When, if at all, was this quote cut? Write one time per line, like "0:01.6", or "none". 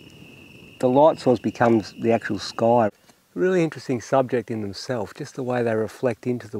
0:02.9